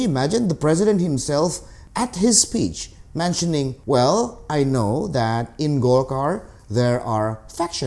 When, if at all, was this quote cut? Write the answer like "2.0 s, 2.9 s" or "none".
none